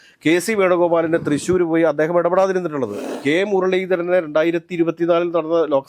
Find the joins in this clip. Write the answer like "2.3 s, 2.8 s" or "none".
3.1 s